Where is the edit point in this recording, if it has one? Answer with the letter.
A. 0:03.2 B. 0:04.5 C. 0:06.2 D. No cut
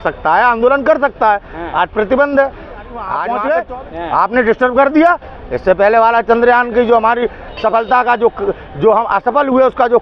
A